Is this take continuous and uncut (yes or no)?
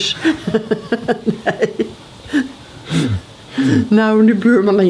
yes